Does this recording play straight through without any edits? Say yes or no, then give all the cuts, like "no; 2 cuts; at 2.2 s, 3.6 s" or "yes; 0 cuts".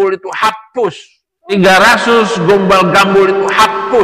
no; 2 cuts; at 1.5 s, 2.2 s